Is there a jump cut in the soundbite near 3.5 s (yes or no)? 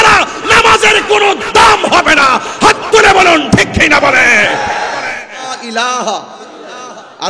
no